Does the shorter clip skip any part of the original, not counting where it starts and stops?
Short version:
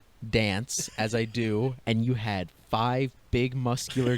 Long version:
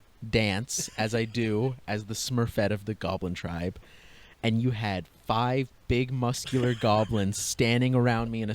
yes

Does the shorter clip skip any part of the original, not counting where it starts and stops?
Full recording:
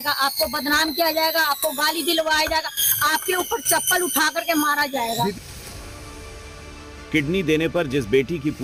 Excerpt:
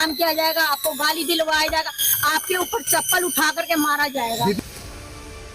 yes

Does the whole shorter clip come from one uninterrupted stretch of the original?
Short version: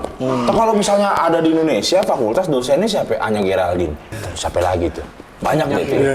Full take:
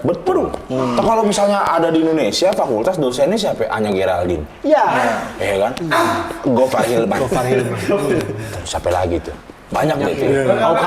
no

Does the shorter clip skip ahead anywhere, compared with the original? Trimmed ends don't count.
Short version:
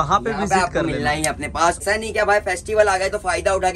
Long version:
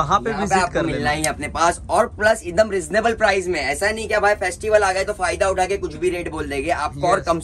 yes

